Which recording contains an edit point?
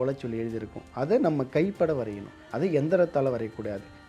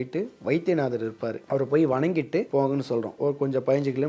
second; 2 cuts; at 1.4 s, 2.7 s

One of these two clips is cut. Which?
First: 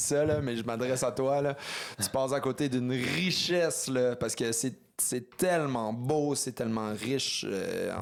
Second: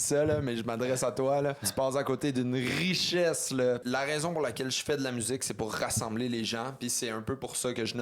second; 2 cuts; at 1.6 s, 3.8 s

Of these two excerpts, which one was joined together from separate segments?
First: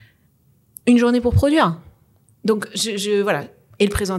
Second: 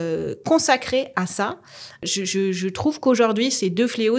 second; 1 cut; at 2.0 s

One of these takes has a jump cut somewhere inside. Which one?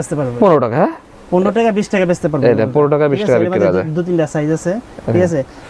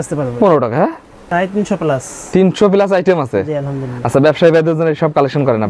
second; 1 cut; at 1.1 s

